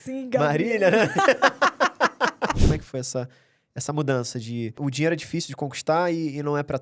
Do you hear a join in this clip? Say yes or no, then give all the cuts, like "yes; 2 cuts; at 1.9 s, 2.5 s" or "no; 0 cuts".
yes; 2 cuts; at 2.6 s, 4.8 s